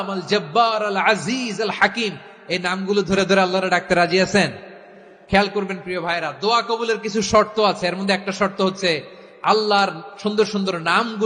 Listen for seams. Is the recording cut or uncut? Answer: uncut